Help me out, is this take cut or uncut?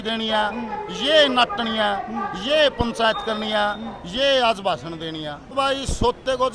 cut